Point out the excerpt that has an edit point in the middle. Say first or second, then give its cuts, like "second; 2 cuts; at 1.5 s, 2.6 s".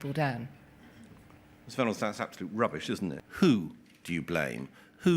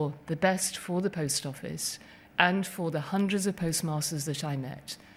first; 1 cut; at 3.2 s